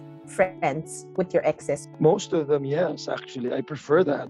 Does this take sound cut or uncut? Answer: cut